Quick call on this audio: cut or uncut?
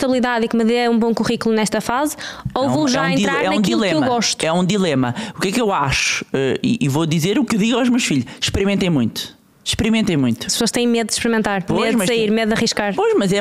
uncut